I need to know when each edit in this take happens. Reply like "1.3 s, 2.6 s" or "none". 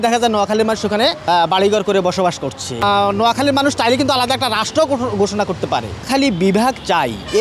1.2 s, 2.8 s, 6.1 s